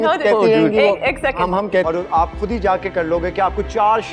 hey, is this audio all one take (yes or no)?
no